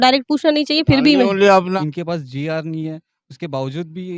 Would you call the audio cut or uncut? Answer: cut